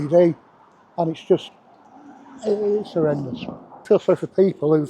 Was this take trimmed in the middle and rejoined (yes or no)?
yes